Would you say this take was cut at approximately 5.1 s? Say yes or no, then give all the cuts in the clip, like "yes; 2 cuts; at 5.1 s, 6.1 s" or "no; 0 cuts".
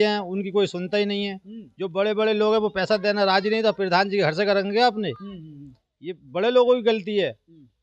no; 0 cuts